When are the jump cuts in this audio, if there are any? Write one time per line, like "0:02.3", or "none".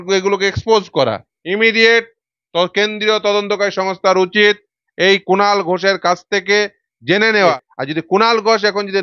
0:01.3
0:07.7